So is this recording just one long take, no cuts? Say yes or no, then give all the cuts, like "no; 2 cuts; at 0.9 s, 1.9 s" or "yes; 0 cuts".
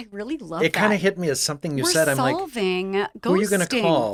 yes; 0 cuts